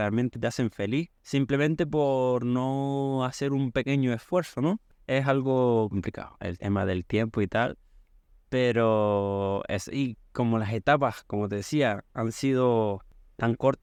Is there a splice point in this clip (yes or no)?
no